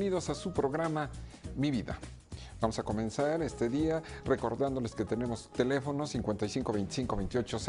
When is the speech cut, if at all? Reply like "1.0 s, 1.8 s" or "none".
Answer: 6.1 s